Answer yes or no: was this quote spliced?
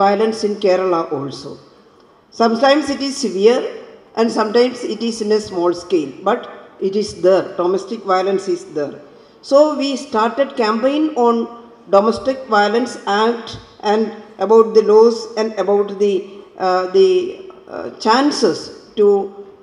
no